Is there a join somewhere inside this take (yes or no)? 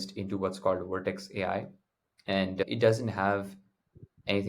yes